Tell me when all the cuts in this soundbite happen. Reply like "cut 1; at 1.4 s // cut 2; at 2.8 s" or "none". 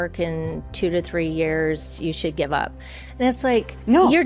none